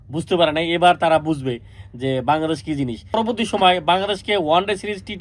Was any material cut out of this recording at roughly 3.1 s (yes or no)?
yes